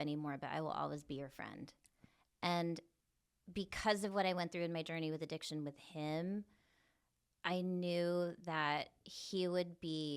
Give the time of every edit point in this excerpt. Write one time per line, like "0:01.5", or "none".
0:02.0